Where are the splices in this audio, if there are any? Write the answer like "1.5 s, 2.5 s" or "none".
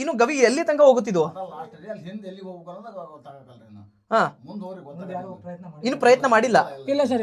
none